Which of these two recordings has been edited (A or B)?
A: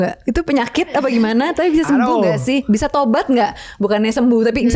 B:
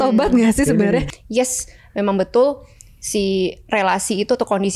B